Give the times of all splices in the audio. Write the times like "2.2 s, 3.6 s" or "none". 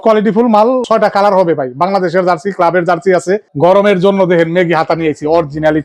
3.5 s